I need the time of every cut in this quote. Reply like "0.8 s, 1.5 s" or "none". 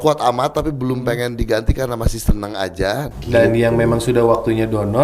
3.1 s